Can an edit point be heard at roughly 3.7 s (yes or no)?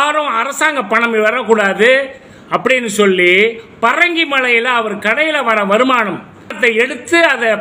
no